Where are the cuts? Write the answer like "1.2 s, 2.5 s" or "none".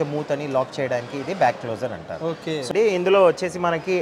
2.7 s